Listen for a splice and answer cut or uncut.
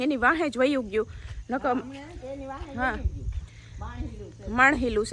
uncut